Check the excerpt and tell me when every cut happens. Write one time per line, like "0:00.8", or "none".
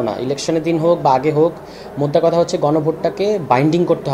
none